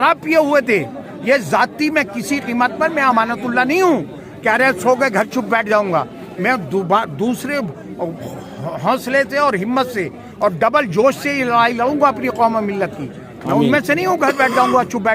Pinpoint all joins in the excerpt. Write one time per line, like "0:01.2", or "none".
none